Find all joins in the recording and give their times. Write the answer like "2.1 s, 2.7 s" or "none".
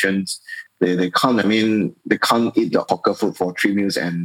2.9 s